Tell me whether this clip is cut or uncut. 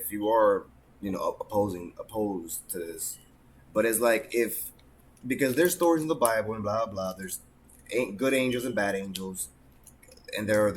uncut